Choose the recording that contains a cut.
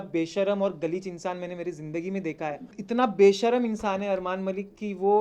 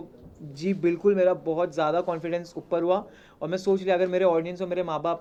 first; 1 cut; at 2.7 s

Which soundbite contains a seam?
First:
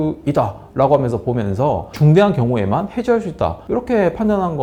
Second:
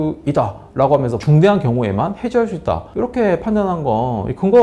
second; 1 cut; at 1.2 s

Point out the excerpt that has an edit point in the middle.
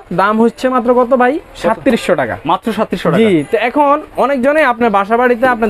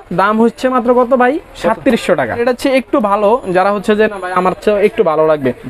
second; 1 cut; at 2.4 s

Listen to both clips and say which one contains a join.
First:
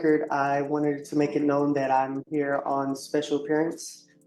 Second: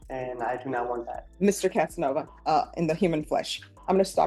second; 2 cuts; at 1.2 s, 2.3 s

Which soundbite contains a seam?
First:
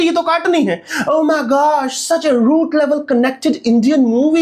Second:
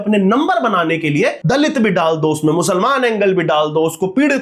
second; 1 cut; at 1.4 s

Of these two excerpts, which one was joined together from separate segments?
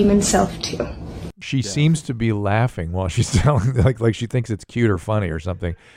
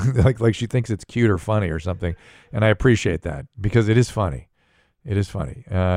first; 1 cut; at 1.3 s

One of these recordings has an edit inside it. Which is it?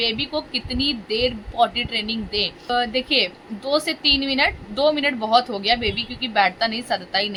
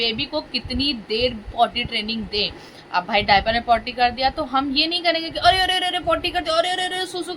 second; 1 cut; at 2.6 s

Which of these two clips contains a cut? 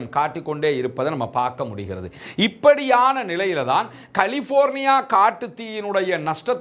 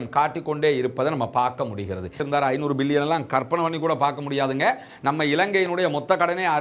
second; 1 cut; at 2.2 s

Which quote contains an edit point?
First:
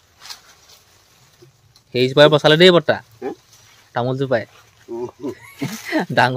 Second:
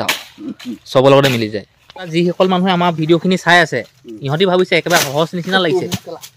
second; 1 cut; at 2.1 s

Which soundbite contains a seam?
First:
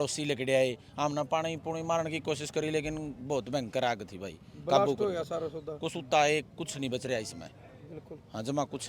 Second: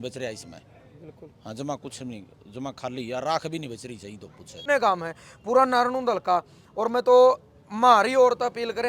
second; 1 cut; at 4.7 s

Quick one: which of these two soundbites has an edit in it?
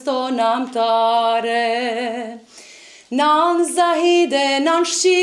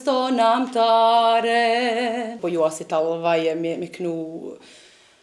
second; 1 cut; at 2.3 s

